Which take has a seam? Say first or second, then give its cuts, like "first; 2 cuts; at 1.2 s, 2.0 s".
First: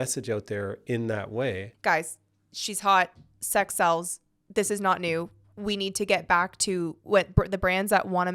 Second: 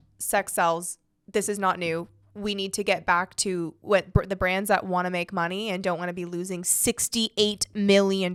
first; 1 cut; at 1.7 s